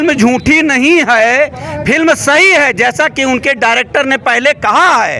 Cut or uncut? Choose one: uncut